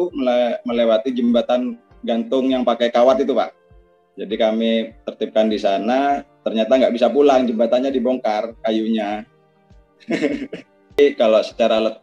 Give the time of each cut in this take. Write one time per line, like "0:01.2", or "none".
0:11.0

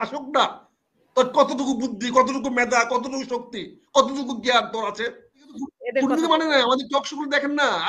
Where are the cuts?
0:05.7

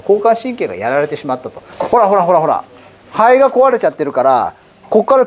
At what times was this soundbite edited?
0:01.6

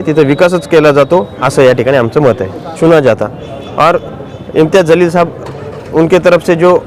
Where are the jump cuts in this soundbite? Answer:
0:02.8

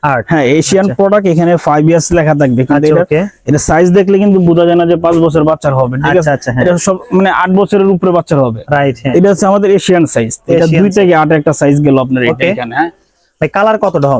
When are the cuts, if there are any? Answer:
none

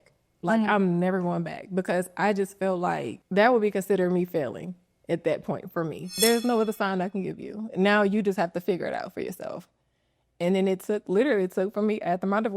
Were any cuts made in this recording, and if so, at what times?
0:03.2
0:06.1

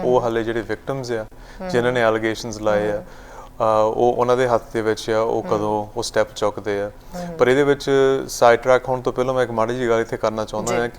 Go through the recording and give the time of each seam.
none

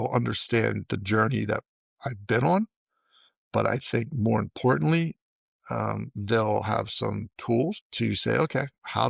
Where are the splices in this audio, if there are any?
0:07.9

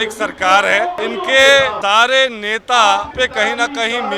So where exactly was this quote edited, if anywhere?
0:01.0
0:01.8
0:03.1

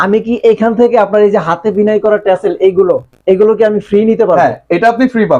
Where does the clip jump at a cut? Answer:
none

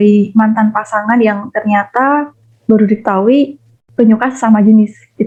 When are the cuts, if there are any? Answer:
none

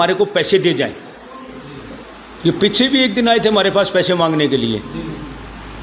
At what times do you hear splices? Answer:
none

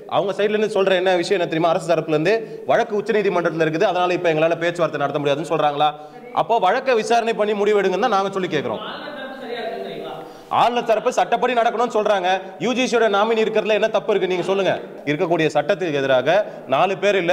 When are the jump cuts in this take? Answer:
0:14.9

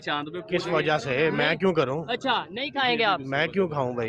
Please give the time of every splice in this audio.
none

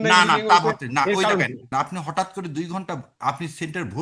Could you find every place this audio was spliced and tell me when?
0:01.7

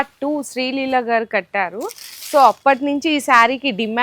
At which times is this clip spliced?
none

